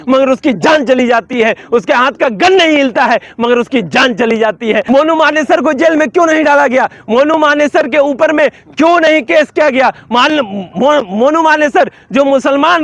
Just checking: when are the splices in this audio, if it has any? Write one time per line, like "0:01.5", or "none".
0:04.8